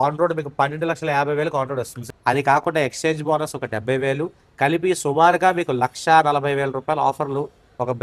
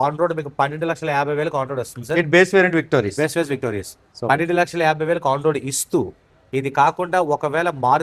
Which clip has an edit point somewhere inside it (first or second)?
first